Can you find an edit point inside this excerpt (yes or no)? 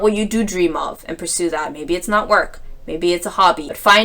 no